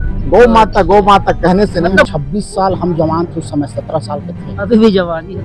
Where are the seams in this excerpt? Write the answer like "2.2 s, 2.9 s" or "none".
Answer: 2.0 s

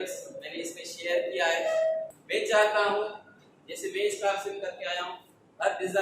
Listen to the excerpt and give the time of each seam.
2.1 s

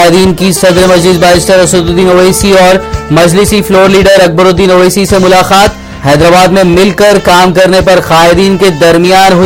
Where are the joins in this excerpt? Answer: none

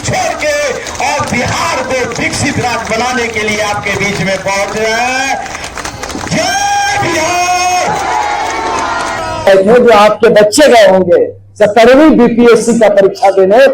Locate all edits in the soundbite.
9.5 s

